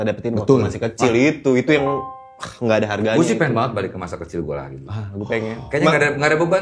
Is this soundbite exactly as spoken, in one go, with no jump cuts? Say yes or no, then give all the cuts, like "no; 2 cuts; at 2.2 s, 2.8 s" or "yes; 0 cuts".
yes; 0 cuts